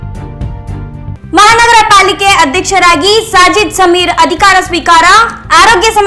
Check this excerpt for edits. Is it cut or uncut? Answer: cut